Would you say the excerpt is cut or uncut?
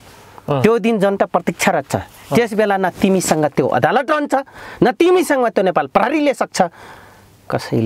uncut